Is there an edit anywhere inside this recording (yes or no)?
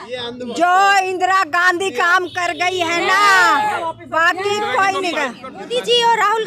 yes